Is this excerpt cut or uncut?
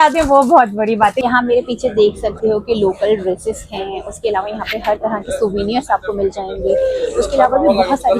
cut